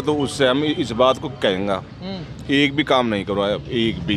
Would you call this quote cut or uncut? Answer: uncut